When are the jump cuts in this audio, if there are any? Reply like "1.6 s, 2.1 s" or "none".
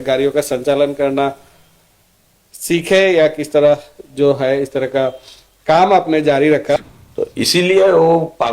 6.8 s